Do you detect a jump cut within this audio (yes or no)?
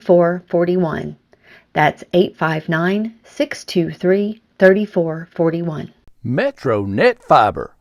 yes